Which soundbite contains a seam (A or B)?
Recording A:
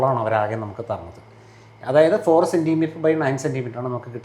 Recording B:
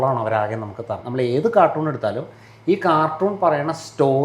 B